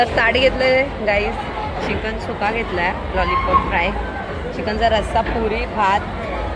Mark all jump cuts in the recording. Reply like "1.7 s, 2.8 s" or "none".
none